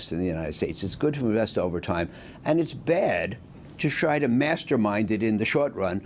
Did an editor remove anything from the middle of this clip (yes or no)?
no